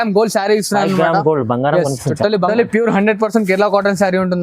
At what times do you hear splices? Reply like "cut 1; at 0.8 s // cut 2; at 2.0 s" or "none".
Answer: cut 1; at 2.5 s

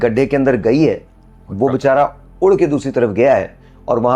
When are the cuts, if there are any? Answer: none

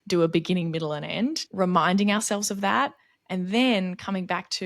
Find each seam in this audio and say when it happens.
cut 1; at 1.4 s

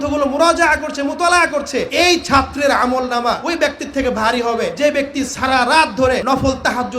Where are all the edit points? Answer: cut 1; at 1.9 s // cut 2; at 3.4 s // cut 3; at 4.7 s // cut 4; at 6.2 s

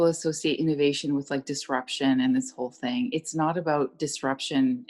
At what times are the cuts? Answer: none

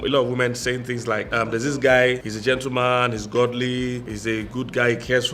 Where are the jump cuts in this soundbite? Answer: cut 1; at 1.3 s // cut 2; at 2.3 s // cut 3; at 4.1 s

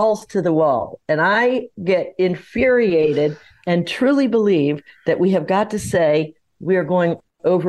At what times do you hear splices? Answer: none

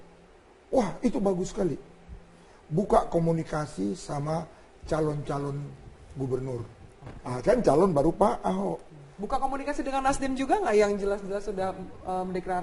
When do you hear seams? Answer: none

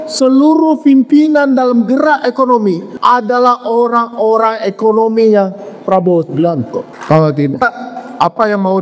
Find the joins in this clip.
cut 1; at 2.9 s // cut 2; at 6.9 s

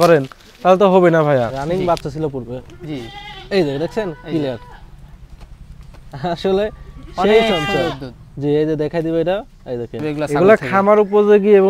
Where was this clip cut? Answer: cut 1; at 1.6 s // cut 2; at 10.0 s

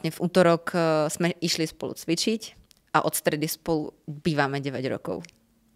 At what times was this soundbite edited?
none

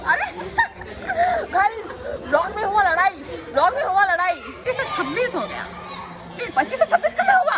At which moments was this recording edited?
cut 1; at 4.6 s

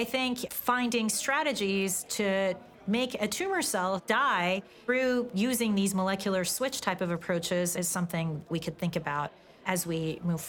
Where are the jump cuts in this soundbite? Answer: cut 1; at 4.0 s // cut 2; at 8.5 s

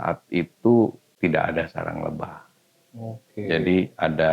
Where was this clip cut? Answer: cut 1; at 1.1 s

